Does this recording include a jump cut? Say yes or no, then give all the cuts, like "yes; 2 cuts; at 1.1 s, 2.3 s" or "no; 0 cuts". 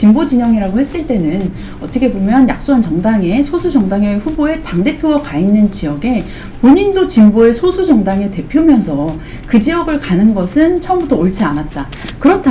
no; 0 cuts